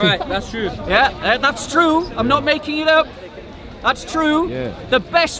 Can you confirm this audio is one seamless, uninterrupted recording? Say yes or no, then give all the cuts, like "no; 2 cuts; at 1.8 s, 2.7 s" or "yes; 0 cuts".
yes; 0 cuts